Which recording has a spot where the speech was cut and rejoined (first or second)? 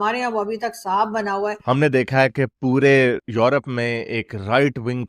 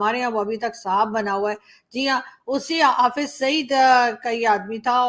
first